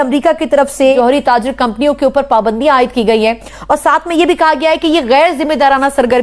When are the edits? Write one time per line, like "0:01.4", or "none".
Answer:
0:00.9